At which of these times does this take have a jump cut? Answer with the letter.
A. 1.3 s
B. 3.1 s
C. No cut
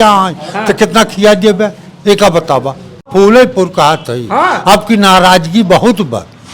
B